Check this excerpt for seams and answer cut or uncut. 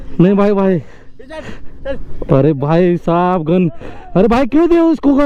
uncut